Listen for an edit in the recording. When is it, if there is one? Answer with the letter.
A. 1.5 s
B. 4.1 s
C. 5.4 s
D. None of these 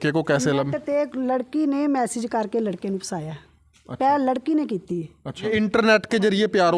C